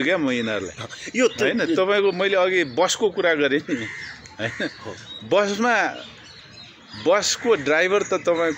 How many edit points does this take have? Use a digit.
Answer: 0